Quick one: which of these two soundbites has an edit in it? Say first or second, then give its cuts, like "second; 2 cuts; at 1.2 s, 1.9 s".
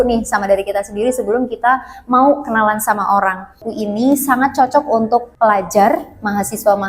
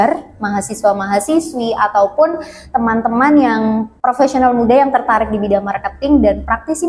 first; 1 cut; at 3.7 s